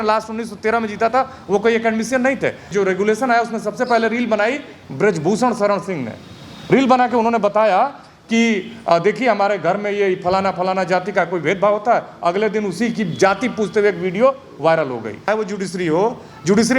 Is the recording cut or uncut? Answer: cut